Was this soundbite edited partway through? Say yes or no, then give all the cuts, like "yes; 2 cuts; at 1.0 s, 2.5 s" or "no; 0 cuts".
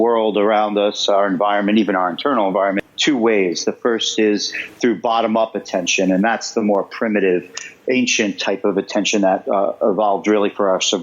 yes; 1 cut; at 2.8 s